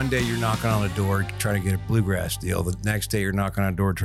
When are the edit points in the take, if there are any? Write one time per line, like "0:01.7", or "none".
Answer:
none

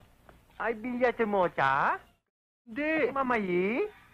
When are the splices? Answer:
0:03.1

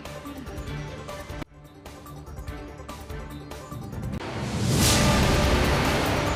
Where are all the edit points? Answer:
none

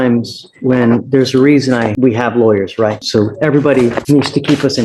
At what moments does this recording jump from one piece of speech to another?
0:01.9
0:03.0
0:04.0

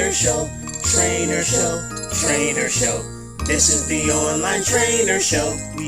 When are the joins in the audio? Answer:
none

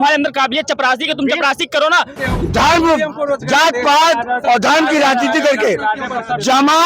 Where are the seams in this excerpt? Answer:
0:02.2

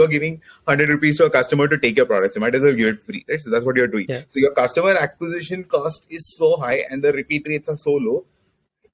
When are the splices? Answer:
none

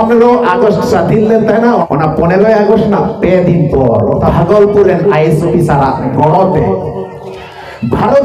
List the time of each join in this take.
0:01.8
0:04.3
0:06.1

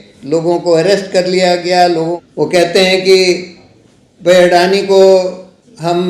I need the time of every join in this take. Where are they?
0:02.1

